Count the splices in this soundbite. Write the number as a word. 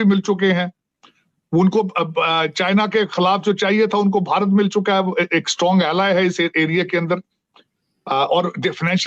zero